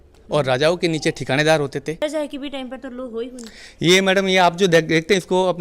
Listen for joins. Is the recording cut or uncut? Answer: cut